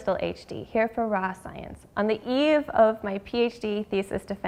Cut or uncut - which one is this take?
uncut